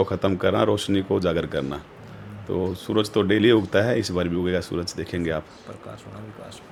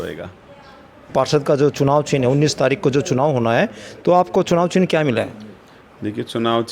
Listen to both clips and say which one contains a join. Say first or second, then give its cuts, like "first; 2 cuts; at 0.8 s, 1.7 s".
second; 1 cut; at 0.9 s